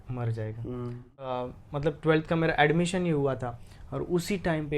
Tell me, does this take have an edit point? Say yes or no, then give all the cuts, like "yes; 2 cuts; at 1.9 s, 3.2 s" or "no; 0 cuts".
yes; 1 cut; at 1.3 s